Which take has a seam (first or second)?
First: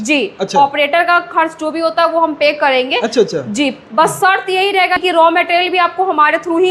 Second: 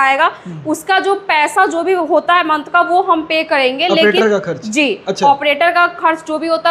first